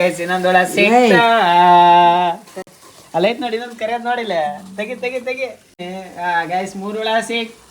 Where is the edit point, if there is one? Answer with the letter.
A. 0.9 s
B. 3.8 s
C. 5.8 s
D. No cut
C